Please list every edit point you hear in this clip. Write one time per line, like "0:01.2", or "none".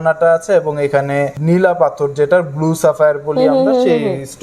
0:01.4